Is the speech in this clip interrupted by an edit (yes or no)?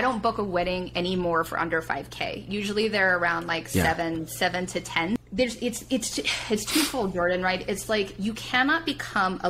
yes